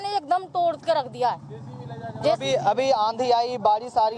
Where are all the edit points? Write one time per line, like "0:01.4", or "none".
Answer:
none